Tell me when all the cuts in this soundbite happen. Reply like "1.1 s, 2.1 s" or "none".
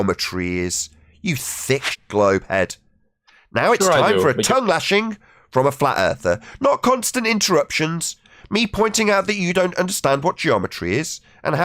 2.0 s

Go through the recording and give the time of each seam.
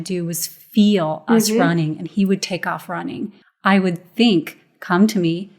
3.3 s

